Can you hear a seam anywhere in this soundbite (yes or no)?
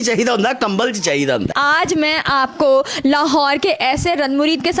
yes